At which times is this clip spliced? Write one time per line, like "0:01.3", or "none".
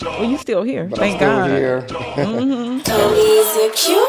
0:02.8